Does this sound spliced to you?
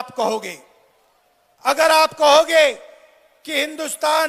no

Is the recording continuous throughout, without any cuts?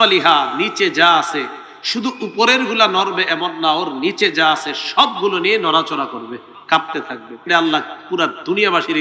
no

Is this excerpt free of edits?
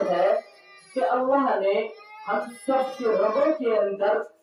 yes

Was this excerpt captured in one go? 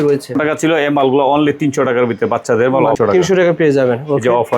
no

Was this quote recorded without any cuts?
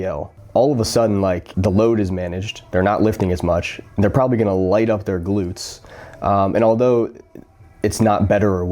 no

